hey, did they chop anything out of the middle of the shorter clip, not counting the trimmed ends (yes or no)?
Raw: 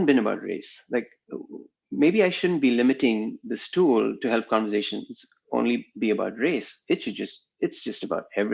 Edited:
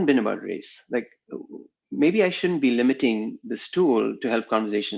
no